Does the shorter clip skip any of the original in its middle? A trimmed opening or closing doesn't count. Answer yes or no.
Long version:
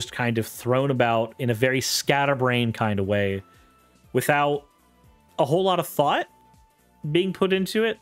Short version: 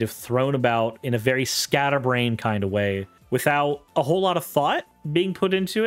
yes